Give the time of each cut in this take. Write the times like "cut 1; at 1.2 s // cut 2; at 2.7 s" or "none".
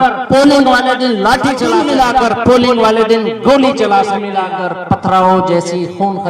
cut 1; at 1.8 s // cut 2; at 4.3 s